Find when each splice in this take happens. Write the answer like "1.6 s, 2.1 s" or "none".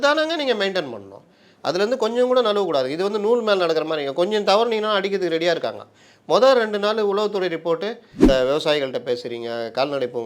8.2 s

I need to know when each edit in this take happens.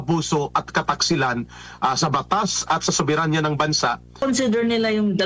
4.2 s

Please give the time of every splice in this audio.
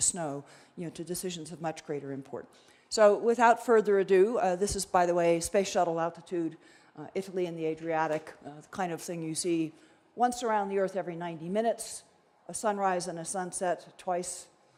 none

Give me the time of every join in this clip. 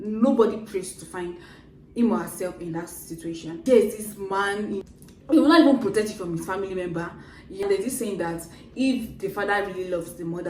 3.6 s, 4.8 s, 7.6 s

